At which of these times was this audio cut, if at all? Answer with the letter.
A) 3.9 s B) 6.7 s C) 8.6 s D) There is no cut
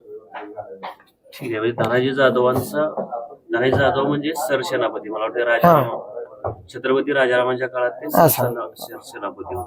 D